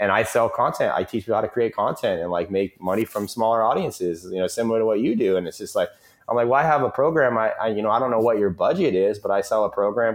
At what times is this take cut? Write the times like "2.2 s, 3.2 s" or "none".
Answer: none